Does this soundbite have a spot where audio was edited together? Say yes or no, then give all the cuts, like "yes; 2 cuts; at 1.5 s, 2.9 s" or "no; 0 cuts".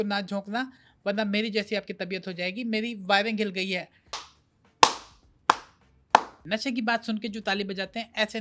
yes; 2 cuts; at 4.3 s, 6.4 s